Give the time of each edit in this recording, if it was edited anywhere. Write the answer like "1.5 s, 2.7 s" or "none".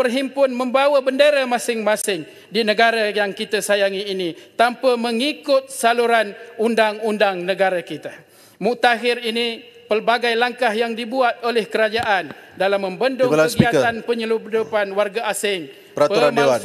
none